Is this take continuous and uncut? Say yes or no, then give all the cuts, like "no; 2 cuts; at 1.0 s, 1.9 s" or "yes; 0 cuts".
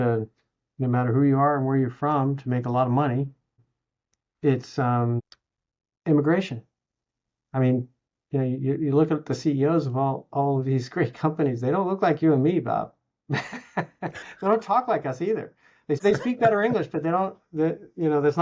no; 1 cut; at 16.0 s